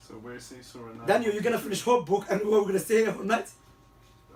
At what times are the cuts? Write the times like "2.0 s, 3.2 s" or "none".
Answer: none